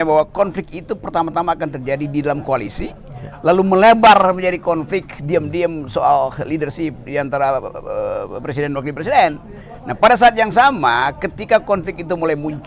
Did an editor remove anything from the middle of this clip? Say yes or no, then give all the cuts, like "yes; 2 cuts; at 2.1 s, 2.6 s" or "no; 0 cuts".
no; 0 cuts